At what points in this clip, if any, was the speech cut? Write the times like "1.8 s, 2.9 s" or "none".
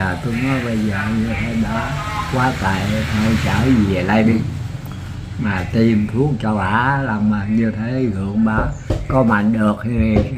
none